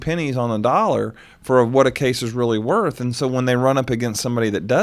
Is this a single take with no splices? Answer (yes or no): yes